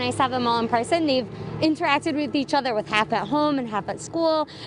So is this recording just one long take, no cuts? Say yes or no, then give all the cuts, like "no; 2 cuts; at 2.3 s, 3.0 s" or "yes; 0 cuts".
no; 1 cut; at 1.0 s